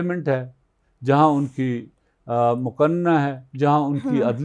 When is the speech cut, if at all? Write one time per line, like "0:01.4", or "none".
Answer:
none